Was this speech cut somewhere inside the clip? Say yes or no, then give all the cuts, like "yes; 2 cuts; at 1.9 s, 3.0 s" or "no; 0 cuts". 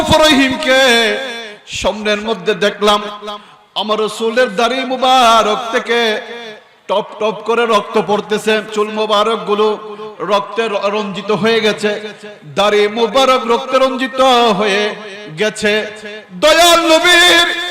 yes; 1 cut; at 8.7 s